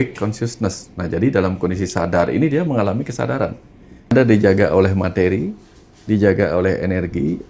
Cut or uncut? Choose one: cut